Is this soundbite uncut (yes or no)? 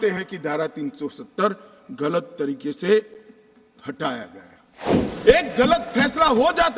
no